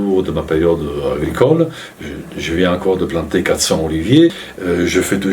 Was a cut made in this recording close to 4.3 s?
yes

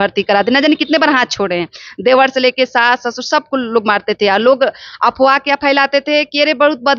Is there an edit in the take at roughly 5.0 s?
no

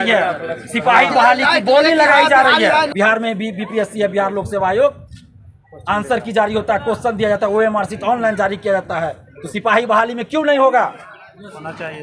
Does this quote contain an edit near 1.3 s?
no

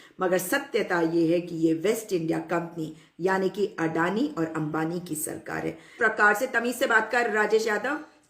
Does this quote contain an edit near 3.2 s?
no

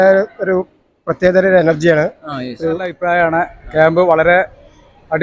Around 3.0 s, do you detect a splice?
yes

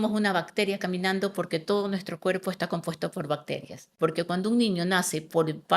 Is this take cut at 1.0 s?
no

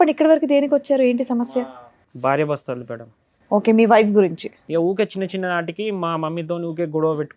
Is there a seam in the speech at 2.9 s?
no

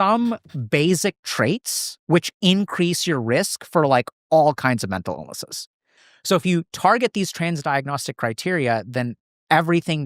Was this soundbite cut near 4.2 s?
no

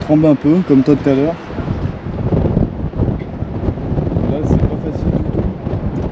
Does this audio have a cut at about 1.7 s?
no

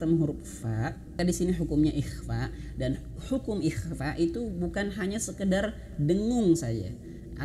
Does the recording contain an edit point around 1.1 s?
yes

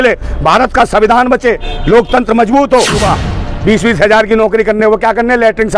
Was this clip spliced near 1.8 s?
no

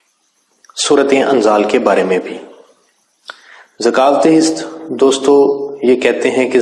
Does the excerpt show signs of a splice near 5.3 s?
yes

